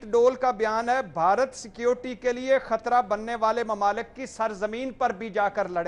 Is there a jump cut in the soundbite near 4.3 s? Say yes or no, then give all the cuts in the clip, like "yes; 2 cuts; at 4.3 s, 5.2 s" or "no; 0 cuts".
no; 0 cuts